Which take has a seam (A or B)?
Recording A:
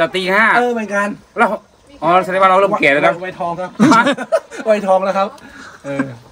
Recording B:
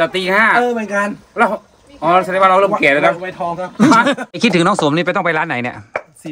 B